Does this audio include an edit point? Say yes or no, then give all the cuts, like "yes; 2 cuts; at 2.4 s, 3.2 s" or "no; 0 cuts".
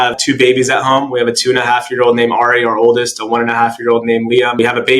no; 0 cuts